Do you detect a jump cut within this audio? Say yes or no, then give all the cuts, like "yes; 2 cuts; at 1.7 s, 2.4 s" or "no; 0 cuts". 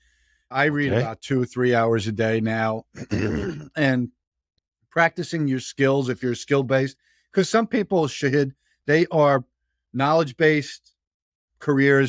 no; 0 cuts